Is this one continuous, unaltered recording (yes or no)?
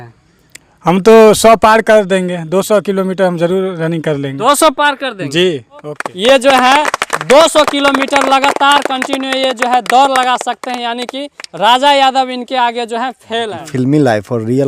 no